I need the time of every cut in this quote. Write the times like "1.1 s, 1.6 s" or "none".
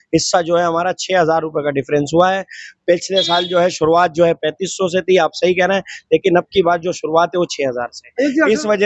none